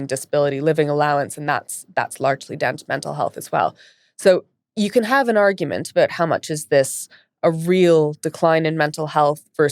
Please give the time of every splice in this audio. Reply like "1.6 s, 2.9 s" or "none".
none